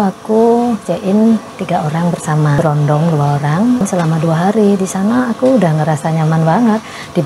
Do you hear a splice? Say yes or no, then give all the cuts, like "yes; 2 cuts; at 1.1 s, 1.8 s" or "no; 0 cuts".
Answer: yes; 2 cuts; at 2.6 s, 3.8 s